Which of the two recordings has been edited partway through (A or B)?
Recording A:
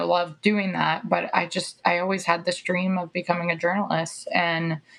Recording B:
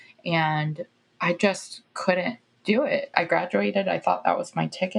B